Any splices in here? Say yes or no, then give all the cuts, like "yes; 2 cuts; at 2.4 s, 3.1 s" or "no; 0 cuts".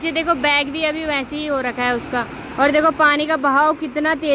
no; 0 cuts